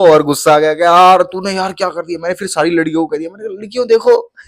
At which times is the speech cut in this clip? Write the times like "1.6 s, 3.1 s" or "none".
none